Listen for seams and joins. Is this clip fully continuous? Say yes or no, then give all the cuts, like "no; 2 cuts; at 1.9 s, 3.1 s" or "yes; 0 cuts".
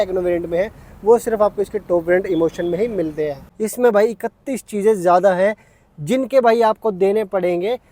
no; 1 cut; at 3.4 s